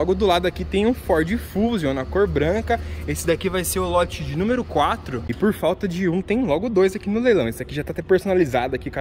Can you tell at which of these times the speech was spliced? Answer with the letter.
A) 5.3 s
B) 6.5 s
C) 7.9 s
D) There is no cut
A